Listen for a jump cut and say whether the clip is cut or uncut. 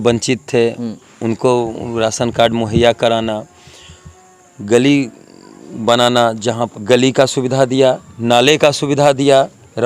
cut